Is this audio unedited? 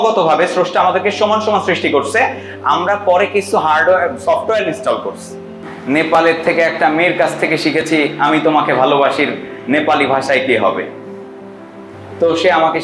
no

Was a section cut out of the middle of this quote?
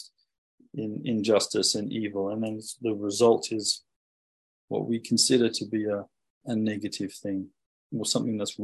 yes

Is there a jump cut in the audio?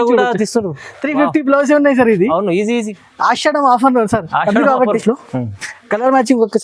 yes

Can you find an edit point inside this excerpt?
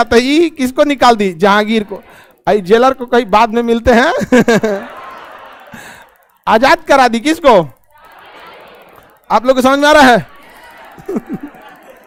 no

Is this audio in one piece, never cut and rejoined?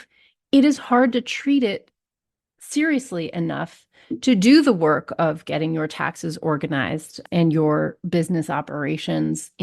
no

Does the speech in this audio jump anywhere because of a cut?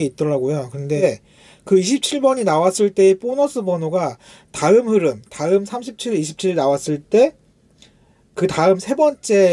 yes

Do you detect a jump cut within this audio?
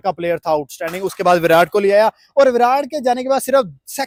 no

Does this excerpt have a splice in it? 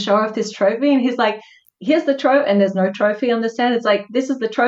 no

